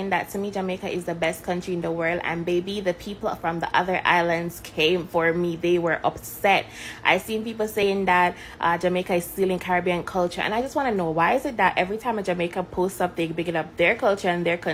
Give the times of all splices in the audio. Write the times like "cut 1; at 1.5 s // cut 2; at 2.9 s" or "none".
none